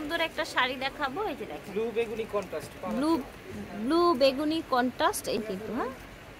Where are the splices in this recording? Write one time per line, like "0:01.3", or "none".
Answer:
0:05.4